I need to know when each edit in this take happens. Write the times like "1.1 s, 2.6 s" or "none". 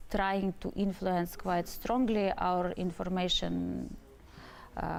none